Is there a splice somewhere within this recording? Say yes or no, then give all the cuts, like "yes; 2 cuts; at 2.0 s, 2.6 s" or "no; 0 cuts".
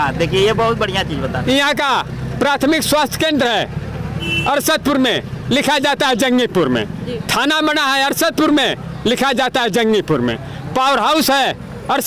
no; 0 cuts